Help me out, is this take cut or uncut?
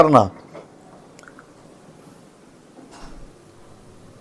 uncut